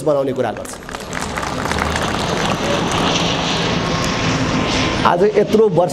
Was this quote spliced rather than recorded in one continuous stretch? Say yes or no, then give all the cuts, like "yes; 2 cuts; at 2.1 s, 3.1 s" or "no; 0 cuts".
no; 0 cuts